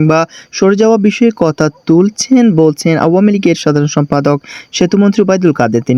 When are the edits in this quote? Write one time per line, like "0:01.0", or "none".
none